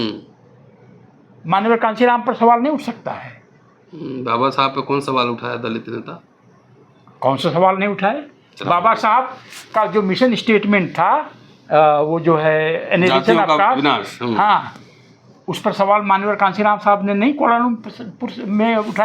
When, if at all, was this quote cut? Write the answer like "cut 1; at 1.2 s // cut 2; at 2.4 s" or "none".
none